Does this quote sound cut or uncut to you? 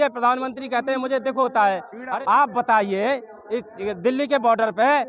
cut